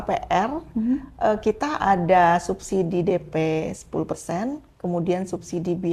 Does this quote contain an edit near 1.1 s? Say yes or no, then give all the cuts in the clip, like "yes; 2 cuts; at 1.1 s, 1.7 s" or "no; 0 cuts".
no; 0 cuts